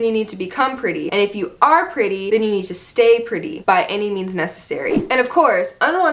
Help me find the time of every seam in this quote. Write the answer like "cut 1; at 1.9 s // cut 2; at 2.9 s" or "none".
cut 1; at 1.0 s // cut 2; at 2.2 s // cut 3; at 5.0 s